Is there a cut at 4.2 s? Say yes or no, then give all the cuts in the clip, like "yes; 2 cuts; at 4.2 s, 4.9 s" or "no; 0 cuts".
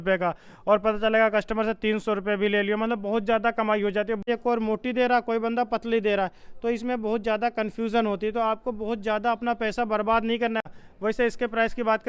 yes; 2 cuts; at 4.2 s, 10.7 s